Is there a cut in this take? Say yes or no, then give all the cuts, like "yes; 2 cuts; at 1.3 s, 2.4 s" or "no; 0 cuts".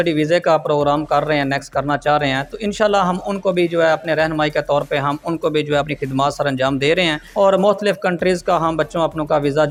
no; 0 cuts